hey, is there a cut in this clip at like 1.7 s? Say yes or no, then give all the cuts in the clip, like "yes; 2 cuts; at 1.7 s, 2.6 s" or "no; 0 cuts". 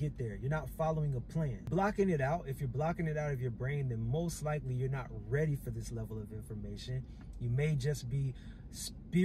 yes; 1 cut; at 1.7 s